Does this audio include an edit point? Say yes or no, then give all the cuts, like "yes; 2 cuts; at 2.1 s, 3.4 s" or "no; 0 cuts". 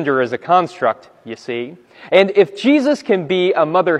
no; 0 cuts